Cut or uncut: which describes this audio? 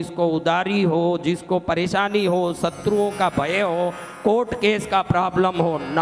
uncut